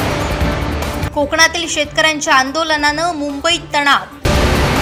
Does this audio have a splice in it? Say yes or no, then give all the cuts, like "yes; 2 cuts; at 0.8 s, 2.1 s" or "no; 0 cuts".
no; 0 cuts